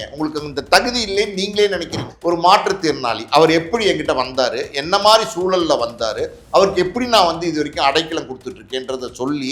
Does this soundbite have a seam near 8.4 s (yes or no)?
no